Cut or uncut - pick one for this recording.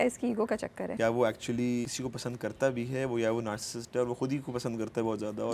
cut